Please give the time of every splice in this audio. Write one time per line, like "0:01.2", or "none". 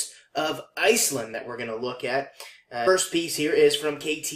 none